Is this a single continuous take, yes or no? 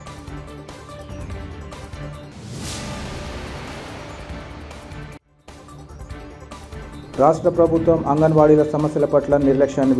yes